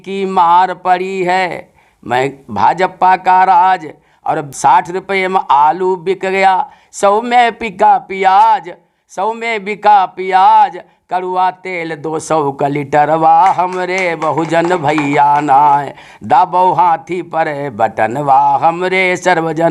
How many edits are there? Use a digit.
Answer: 1